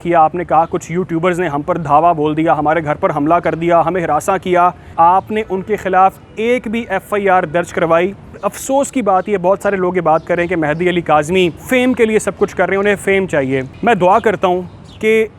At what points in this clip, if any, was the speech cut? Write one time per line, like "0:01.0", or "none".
0:04.9
0:08.4
0:11.6
0:13.7